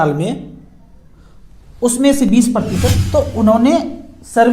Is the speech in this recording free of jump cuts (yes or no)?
no